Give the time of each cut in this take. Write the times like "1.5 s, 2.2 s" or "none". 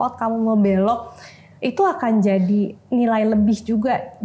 none